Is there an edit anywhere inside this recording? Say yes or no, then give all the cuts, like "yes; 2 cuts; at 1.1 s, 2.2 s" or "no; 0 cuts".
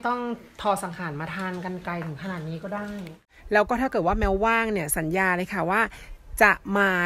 yes; 1 cut; at 3.3 s